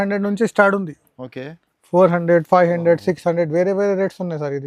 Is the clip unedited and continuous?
yes; 0 cuts

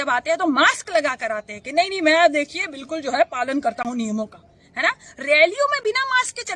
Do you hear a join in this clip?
no; 0 cuts

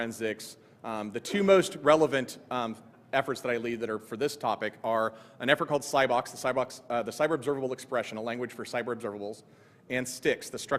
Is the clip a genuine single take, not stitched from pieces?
no; 1 cut; at 1.4 s

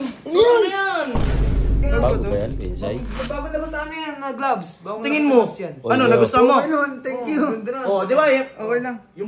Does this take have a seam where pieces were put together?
yes; 1 cut; at 1.6 s

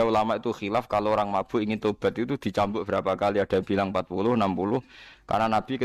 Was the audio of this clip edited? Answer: no; 0 cuts

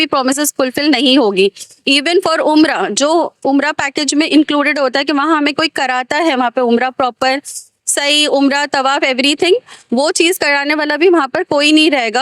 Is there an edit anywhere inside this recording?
no; 0 cuts

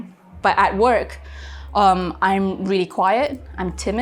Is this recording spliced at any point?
no; 0 cuts

